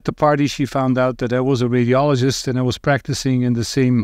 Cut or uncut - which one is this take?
uncut